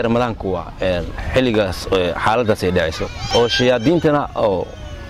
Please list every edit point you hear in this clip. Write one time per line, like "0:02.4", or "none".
0:03.1